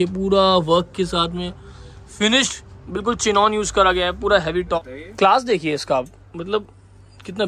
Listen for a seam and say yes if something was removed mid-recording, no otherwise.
yes